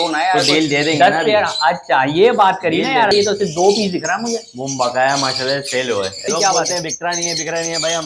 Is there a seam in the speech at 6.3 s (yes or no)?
yes